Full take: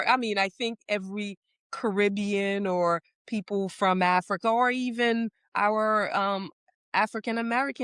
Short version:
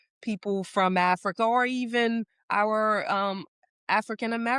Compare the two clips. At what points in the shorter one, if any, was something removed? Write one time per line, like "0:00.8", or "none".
none